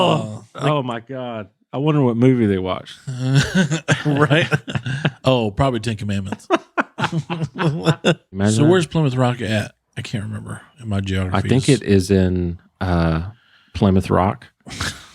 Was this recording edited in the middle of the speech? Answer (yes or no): yes